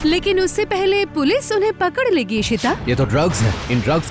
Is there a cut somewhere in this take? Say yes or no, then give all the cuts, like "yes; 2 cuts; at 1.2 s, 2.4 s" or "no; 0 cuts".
yes; 1 cut; at 2.8 s